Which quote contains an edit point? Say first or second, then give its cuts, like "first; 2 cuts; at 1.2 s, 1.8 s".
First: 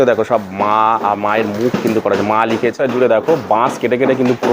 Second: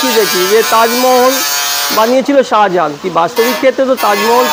first; 1 cut; at 2.7 s